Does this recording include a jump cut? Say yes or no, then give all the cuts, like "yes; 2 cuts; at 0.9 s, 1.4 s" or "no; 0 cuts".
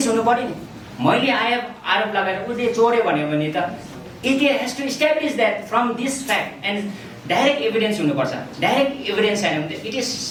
no; 0 cuts